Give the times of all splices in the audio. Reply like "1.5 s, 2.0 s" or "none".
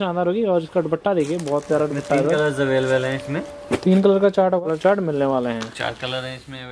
4.7 s